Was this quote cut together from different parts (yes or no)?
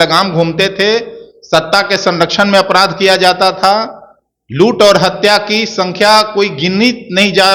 no